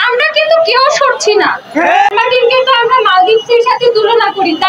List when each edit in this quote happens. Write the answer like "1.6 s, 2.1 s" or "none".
2.1 s